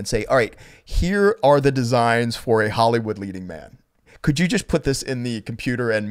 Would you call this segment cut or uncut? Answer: uncut